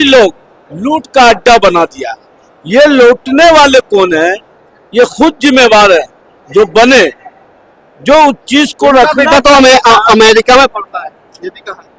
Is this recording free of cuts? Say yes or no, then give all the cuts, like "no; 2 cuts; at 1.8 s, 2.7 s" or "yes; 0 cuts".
yes; 0 cuts